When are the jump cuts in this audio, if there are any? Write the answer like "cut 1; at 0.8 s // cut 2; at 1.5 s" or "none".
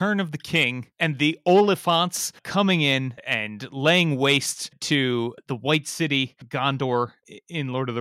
cut 1; at 0.9 s // cut 2; at 3.2 s // cut 3; at 7.2 s

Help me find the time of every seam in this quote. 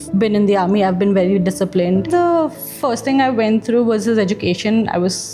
cut 1; at 2.1 s

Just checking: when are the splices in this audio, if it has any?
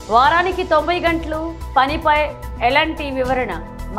none

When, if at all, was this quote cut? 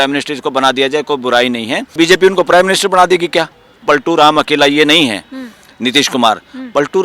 cut 1; at 1.9 s // cut 2; at 3.8 s

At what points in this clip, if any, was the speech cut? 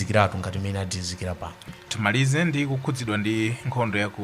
cut 1; at 1.6 s

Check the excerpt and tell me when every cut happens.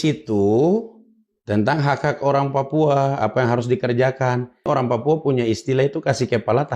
cut 1; at 4.7 s

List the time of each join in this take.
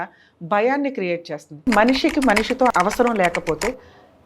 cut 1; at 1.7 s // cut 2; at 2.7 s

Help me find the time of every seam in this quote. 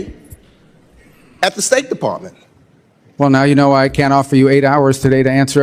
none

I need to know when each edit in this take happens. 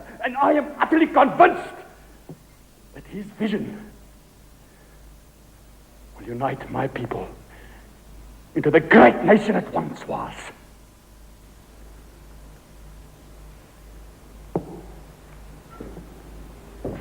cut 1; at 11.4 s

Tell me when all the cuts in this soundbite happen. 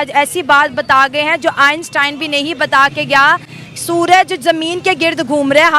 none

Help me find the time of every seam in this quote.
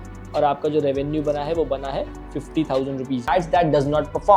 cut 1; at 3.3 s

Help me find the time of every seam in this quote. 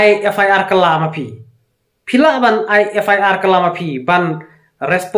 none

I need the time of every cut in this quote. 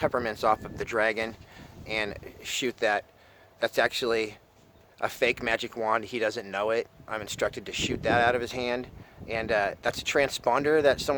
none

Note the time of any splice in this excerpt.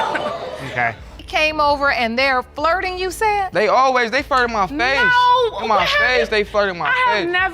cut 1; at 1.2 s

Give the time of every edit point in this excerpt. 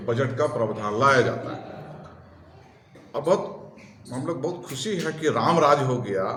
none

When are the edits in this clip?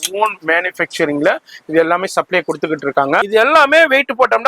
cut 1; at 3.2 s

